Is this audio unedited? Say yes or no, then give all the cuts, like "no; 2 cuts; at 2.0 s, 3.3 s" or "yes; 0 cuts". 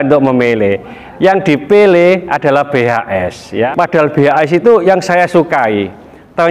no; 1 cut; at 3.7 s